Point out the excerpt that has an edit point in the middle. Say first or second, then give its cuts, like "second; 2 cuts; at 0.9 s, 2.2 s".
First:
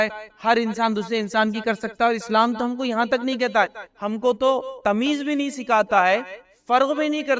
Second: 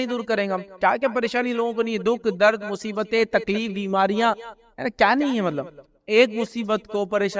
first; 1 cut; at 4.7 s